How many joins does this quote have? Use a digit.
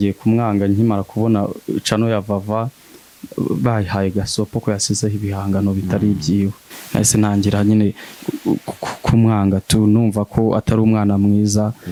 0